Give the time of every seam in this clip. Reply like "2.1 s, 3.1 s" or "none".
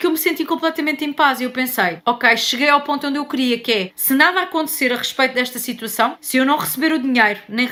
none